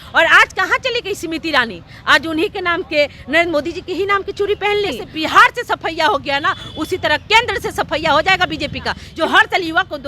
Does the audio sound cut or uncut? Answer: cut